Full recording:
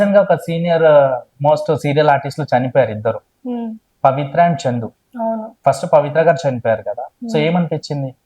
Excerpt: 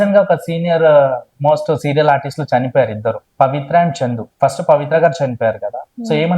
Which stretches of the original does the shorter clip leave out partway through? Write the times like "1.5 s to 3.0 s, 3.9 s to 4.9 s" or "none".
3.2 s to 3.9 s, 4.9 s to 5.5 s